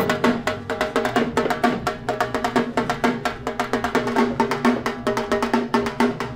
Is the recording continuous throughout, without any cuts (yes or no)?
yes